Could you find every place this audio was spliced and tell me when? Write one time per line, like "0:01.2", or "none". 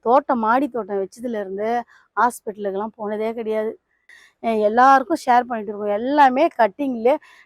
0:04.1